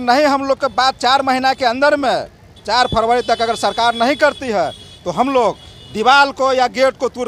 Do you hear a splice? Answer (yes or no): no